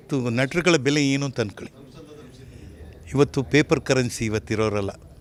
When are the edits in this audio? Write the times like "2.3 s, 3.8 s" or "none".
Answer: none